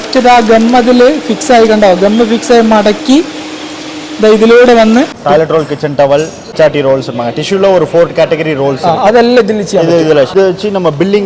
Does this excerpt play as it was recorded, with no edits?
no; 3 cuts; at 5.2 s, 6.5 s, 10.3 s

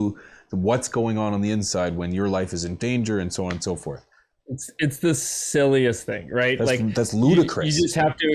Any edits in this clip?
no; 0 cuts

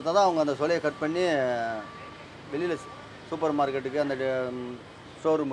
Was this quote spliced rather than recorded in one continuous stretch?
no; 0 cuts

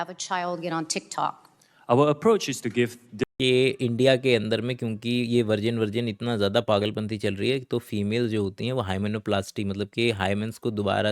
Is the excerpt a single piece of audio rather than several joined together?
no; 1 cut; at 3.1 s

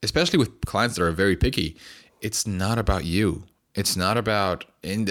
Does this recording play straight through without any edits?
yes; 0 cuts

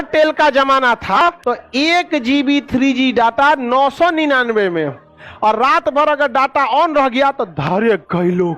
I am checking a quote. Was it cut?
yes; 1 cut; at 1.2 s

